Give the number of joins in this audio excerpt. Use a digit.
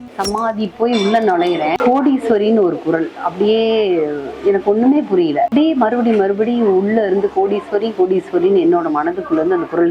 2